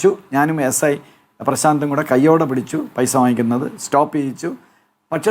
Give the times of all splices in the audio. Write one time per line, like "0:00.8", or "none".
none